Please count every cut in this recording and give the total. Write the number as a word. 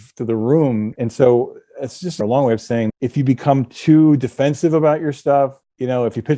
three